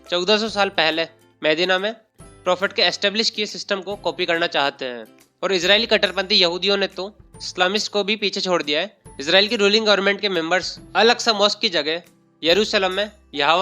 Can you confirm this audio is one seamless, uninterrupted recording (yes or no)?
no